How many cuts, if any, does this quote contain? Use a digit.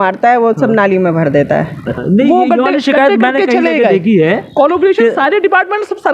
1